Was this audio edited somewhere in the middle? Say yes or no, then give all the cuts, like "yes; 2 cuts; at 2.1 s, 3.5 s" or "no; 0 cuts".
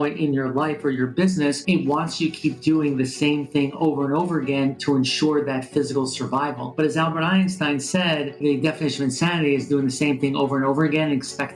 no; 0 cuts